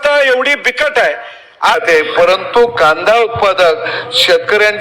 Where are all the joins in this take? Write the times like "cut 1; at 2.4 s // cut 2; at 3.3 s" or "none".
cut 1; at 1.8 s